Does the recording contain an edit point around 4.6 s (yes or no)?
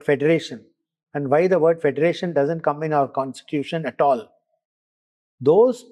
no